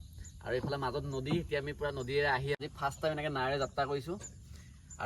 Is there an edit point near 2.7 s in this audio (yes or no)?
yes